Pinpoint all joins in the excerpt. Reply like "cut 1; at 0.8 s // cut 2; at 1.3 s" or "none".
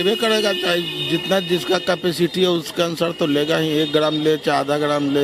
none